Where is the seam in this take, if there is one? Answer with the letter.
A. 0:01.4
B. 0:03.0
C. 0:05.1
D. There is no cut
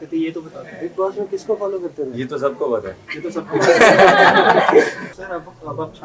C